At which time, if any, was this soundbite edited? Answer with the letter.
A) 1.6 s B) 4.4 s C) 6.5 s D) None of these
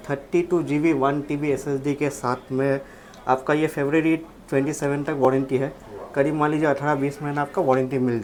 D